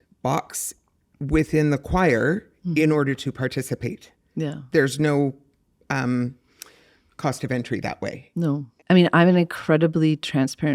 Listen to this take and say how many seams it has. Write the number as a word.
one